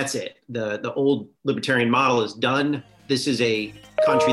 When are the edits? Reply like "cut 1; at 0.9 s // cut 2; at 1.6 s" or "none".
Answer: cut 1; at 1.3 s // cut 2; at 2.9 s